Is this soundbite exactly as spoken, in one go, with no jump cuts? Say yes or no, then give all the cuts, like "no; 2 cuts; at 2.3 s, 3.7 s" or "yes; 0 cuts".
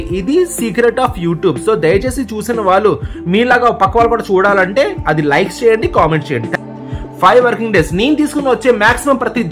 no; 1 cut; at 6.5 s